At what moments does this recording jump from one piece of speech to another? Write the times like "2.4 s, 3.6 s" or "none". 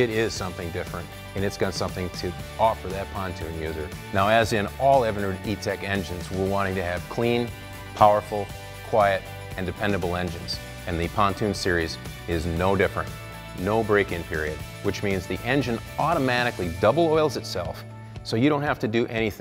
12.0 s